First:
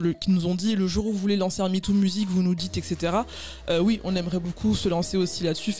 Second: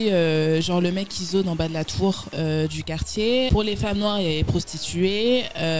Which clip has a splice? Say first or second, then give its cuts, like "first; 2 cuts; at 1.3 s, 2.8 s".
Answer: second; 1 cut; at 3.5 s